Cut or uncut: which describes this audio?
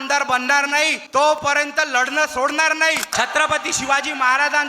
cut